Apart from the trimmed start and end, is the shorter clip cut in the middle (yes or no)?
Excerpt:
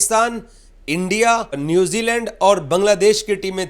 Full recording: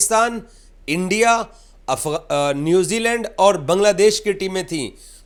yes